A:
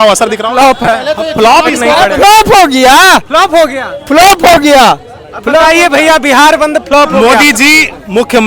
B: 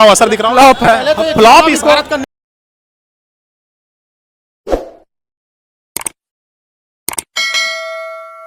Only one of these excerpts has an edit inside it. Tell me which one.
A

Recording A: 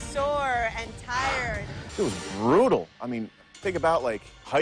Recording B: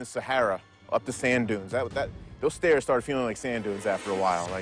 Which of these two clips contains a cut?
A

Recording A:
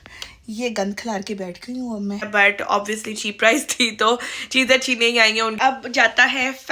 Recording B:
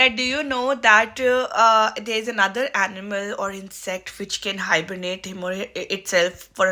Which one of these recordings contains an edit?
A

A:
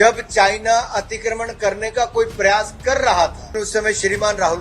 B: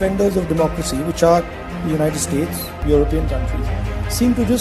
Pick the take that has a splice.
A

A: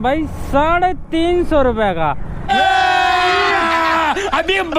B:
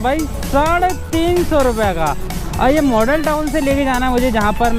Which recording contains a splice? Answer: B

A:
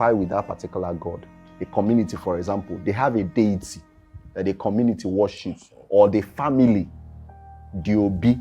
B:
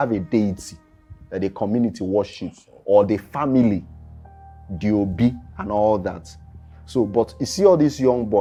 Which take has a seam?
A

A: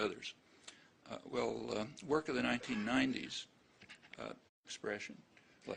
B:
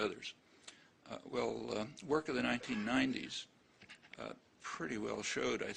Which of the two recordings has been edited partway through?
B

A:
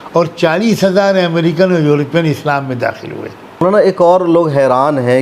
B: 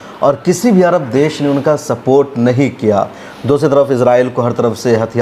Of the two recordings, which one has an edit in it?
A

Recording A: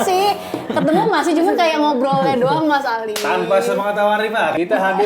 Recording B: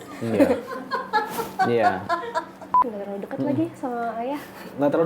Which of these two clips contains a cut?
B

